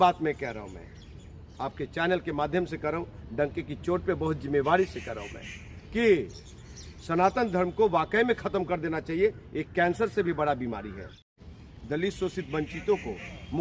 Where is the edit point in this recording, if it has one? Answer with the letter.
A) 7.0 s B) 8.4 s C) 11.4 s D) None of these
C